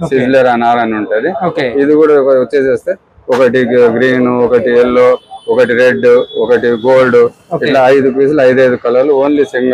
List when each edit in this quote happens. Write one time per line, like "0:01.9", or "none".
none